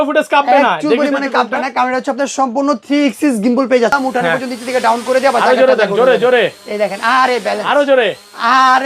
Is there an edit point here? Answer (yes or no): yes